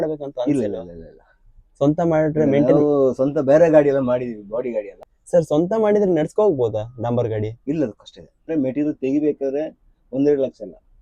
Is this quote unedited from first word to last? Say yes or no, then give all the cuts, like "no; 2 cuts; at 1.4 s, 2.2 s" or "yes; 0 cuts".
no; 2 cuts; at 5.0 s, 8.5 s